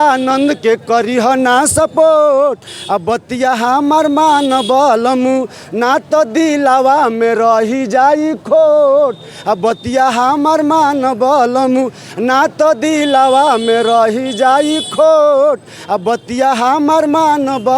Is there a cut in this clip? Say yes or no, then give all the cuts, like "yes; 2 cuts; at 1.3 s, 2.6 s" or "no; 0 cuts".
no; 0 cuts